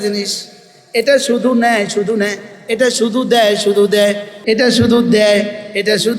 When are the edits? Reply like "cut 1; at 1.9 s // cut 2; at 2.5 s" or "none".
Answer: cut 1; at 4.3 s